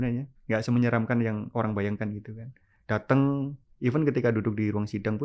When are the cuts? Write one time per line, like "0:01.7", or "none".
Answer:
none

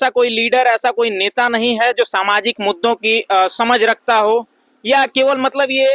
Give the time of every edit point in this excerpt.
none

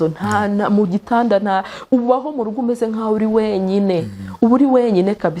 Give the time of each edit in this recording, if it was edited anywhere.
none

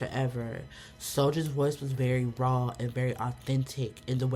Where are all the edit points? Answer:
none

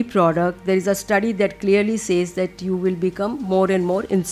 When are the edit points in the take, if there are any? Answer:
none

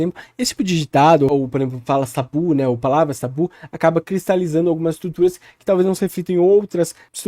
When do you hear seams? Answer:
none

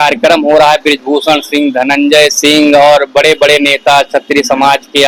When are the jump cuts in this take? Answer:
none

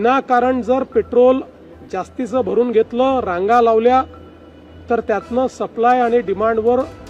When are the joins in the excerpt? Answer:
none

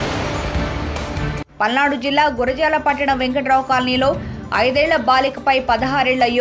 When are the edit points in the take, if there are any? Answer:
0:01.2

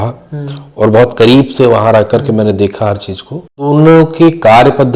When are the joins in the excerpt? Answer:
0:03.7

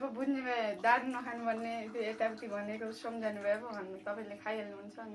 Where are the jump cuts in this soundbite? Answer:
none

